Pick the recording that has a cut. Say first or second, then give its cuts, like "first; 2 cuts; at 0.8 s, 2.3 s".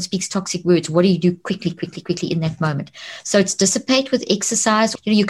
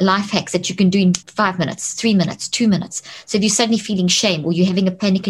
second; 1 cut; at 1.2 s